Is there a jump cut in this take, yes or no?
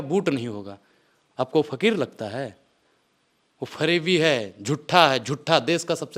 no